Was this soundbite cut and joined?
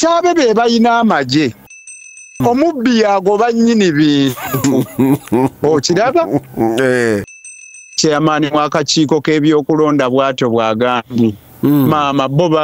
yes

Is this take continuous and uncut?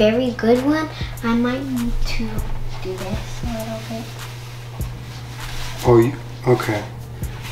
yes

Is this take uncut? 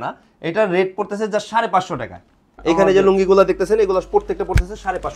no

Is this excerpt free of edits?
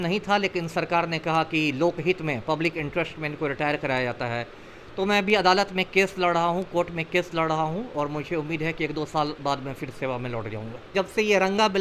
no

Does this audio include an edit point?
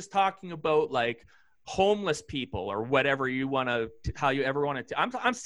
no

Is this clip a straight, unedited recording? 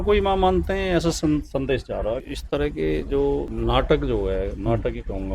no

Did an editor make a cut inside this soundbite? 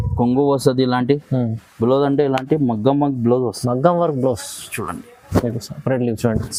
no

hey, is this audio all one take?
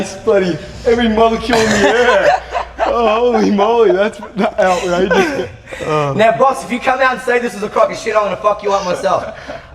yes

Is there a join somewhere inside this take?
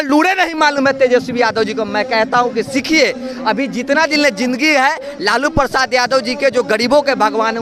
no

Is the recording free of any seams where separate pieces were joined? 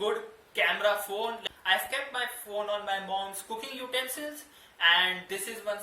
no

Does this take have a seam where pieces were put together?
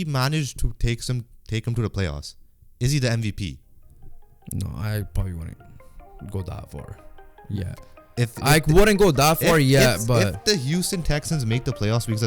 no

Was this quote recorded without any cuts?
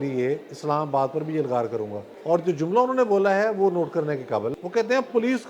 no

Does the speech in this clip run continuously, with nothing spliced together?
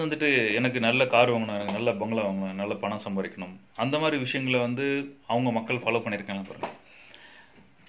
yes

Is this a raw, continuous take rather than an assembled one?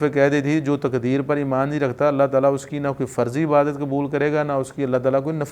yes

